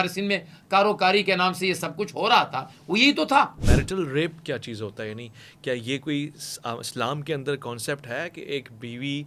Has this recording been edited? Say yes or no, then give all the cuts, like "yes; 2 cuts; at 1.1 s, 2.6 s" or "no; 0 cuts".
yes; 1 cut; at 3.6 s